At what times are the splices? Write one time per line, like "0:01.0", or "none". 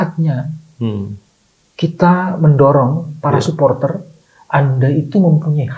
none